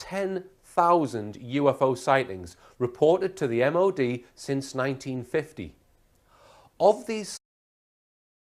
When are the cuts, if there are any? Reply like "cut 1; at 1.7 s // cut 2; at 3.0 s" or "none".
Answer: none